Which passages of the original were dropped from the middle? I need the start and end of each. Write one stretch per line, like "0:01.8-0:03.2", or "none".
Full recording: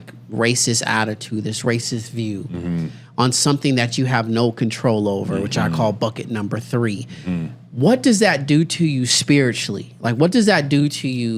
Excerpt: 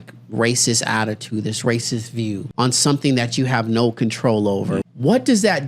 0:02.5-0:03.1
0:05.5-0:07.6